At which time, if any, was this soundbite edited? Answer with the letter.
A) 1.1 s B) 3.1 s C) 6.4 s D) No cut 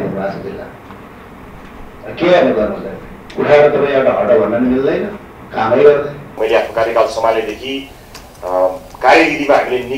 C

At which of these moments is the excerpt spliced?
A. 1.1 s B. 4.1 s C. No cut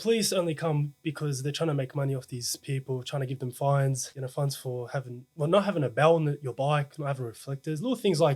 B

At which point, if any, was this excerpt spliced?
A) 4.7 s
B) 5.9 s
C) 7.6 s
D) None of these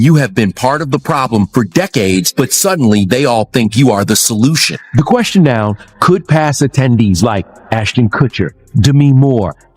A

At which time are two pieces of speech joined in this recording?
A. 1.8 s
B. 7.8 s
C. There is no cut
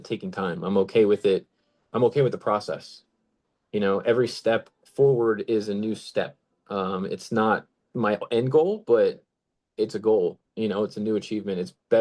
C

